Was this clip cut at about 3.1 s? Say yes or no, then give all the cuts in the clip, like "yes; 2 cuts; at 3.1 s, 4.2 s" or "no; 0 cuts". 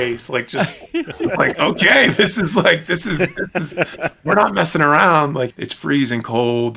no; 1 cut; at 5.5 s